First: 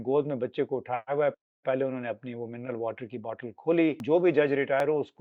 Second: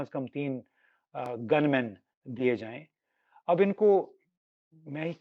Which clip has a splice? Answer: first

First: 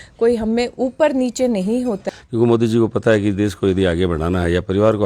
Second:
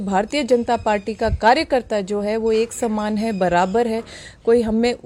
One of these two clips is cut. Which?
first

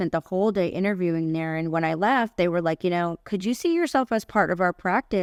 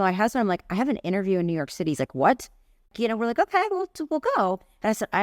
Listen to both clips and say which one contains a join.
second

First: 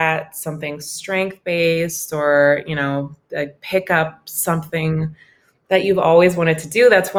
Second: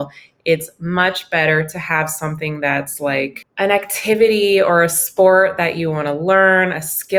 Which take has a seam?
second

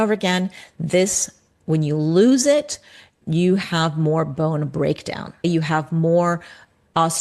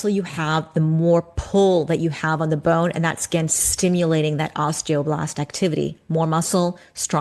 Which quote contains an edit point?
first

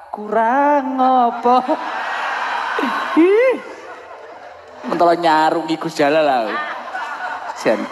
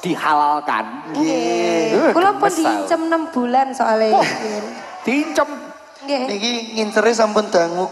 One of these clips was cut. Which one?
first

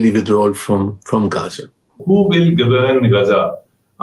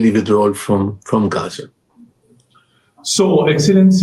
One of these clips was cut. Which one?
first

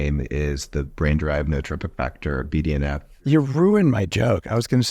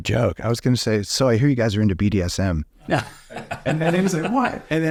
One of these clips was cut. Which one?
first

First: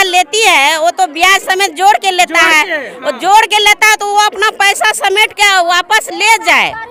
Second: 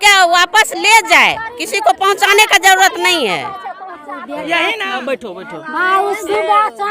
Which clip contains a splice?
second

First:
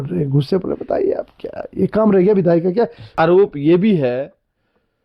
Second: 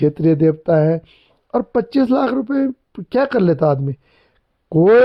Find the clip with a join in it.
first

